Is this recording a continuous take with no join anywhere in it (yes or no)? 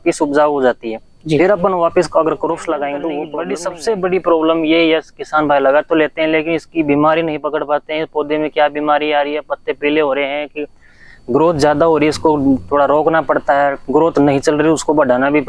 no